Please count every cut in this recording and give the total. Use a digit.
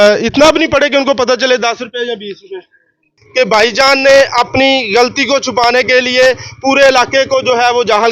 1